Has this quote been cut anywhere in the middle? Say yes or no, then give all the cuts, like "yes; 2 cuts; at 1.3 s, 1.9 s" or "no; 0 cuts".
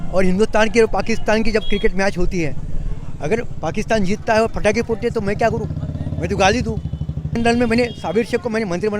yes; 1 cut; at 7.4 s